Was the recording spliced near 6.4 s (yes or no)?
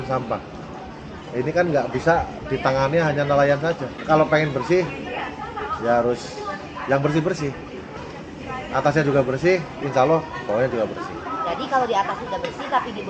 no